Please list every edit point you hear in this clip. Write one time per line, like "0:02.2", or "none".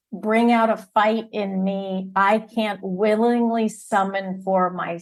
none